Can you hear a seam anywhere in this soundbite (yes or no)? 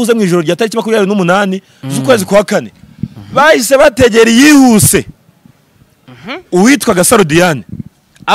no